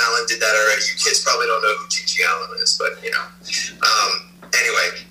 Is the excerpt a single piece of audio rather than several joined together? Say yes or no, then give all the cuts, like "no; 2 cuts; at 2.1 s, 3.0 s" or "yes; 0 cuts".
yes; 0 cuts